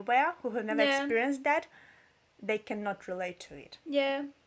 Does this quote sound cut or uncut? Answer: uncut